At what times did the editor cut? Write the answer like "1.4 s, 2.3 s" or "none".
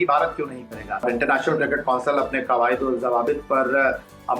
1.0 s